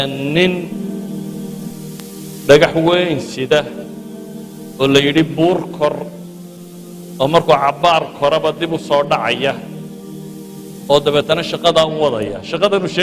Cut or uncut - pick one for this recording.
uncut